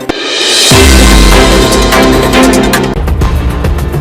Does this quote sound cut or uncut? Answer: cut